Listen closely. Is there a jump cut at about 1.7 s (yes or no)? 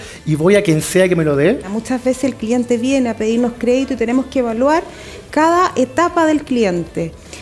yes